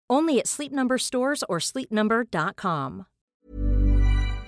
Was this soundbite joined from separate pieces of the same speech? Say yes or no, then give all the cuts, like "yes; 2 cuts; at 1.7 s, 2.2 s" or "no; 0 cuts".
yes; 1 cut; at 3.3 s